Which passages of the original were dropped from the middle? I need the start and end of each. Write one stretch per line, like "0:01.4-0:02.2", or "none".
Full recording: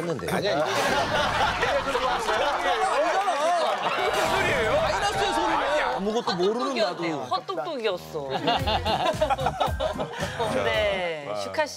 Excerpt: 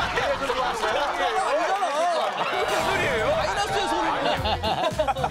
0:05.7-0:08.5

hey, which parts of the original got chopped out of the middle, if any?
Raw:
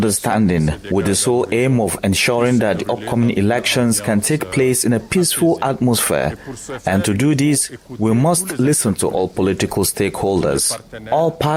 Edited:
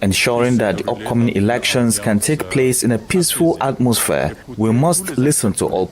0:06.4-0:07.8

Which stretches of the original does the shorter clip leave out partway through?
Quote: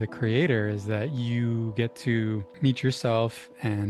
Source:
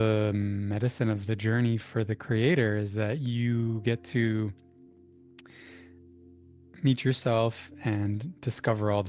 0:04.6-0:06.7

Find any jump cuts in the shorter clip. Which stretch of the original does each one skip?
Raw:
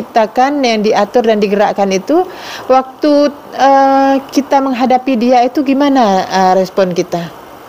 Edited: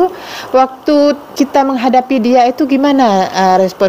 0:03.4-0:04.3

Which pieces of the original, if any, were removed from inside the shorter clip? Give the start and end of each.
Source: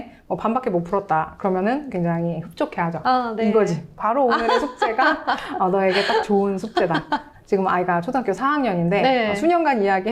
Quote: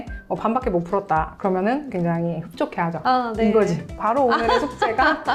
none

